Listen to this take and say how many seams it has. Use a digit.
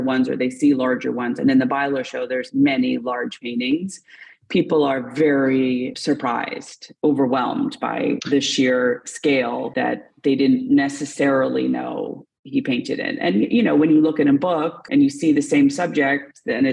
1